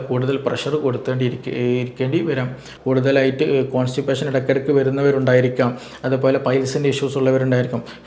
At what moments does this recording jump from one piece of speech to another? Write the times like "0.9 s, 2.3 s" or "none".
2.7 s